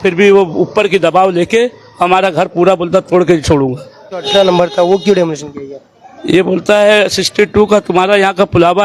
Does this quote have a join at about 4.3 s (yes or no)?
yes